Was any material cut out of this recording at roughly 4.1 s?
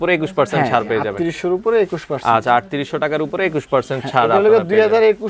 no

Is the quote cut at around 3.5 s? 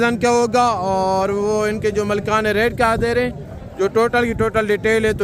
no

